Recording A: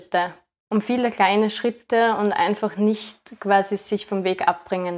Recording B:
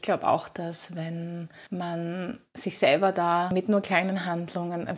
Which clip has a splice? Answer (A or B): B